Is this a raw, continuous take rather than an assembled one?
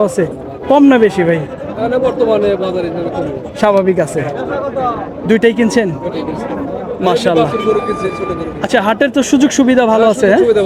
yes; 0 cuts

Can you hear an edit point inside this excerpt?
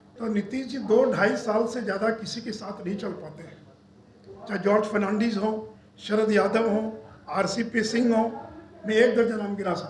no; 0 cuts

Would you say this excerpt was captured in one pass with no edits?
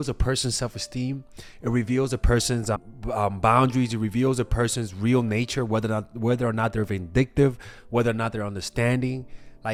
yes; 0 cuts

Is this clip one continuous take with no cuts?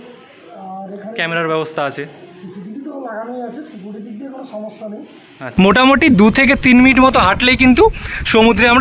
no; 1 cut; at 5.4 s

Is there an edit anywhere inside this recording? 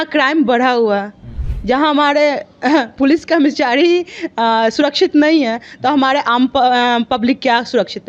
no; 0 cuts

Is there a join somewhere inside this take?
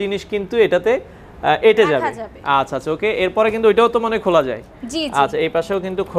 no; 0 cuts

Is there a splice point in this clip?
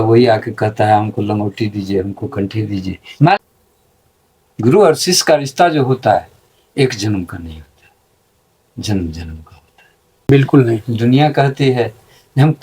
yes; 2 cuts; at 3.4 s, 10.3 s

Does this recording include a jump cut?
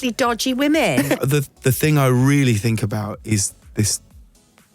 yes; 1 cut; at 1.2 s

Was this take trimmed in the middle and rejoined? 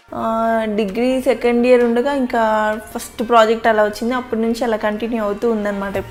no; 0 cuts

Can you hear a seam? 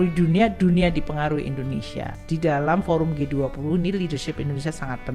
yes; 1 cut; at 2.2 s

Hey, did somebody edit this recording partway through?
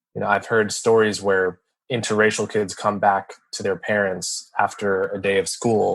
yes; 1 cut; at 1.8 s

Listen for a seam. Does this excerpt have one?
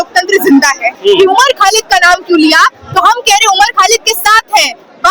yes; 1 cut; at 1.0 s

